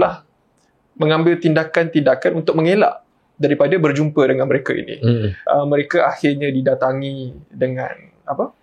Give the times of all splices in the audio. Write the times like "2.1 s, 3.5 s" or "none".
5.3 s